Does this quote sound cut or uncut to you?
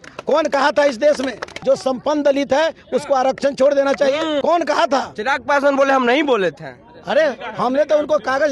cut